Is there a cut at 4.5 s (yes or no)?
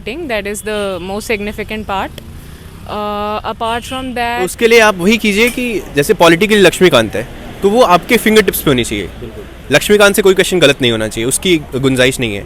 yes